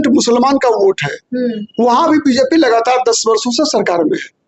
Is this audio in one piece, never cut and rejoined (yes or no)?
yes